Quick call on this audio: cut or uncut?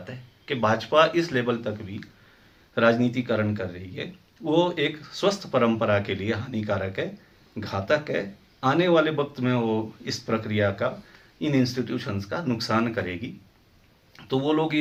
uncut